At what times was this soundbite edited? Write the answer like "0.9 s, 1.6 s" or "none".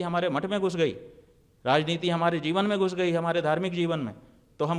none